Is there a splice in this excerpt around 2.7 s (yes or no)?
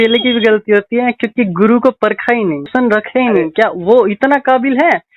yes